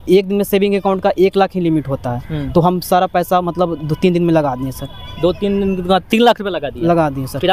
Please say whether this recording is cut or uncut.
uncut